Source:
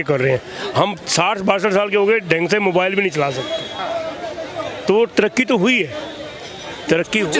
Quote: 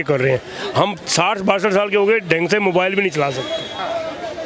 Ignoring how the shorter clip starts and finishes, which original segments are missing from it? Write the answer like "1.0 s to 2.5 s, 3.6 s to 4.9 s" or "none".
none